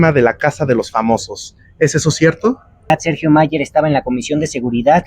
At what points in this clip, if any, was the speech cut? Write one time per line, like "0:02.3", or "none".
0:02.9